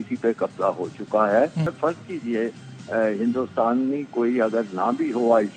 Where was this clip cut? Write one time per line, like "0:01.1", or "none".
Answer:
0:01.7